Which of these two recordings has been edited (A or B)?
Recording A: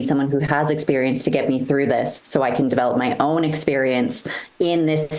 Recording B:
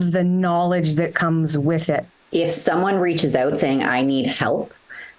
B